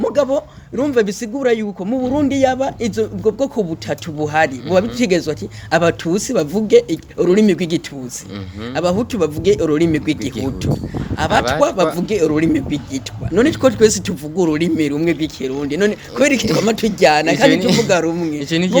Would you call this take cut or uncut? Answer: uncut